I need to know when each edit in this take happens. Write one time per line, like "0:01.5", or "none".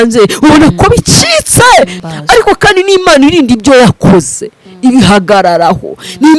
0:02.0